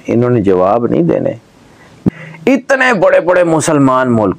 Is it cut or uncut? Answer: cut